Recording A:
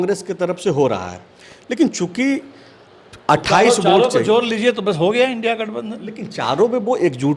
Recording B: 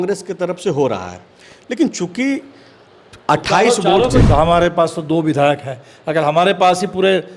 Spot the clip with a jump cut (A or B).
B